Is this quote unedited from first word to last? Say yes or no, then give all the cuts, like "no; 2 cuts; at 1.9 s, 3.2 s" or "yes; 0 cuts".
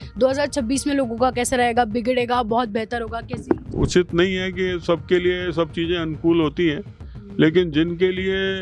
no; 1 cut; at 3.7 s